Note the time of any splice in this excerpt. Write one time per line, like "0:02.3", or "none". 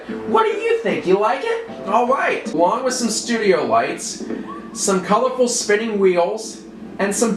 0:02.5